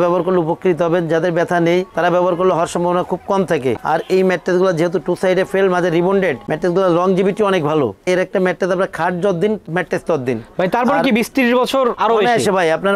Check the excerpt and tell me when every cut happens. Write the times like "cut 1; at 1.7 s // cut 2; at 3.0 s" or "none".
none